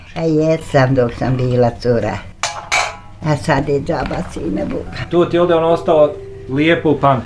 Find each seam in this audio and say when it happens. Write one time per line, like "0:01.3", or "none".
none